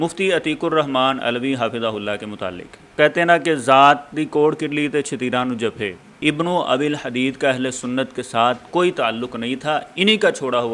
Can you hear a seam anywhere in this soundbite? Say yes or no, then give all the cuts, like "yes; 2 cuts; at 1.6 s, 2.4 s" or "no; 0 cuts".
yes; 2 cuts; at 2.6 s, 6.2 s